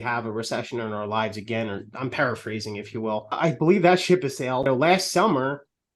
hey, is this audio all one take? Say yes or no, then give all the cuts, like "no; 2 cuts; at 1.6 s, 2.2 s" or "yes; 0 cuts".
no; 2 cuts; at 3.4 s, 4.6 s